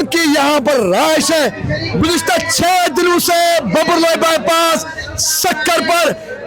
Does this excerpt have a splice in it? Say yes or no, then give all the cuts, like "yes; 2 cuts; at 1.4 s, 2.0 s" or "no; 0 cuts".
yes; 1 cut; at 1.7 s